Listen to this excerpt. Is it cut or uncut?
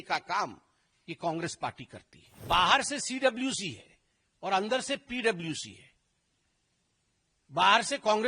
cut